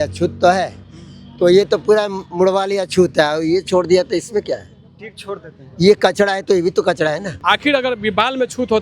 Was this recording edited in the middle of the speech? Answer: yes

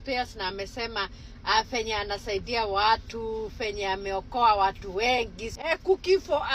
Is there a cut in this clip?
yes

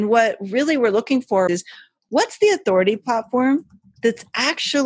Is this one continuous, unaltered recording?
no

